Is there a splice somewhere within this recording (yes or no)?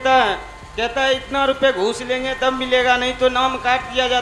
no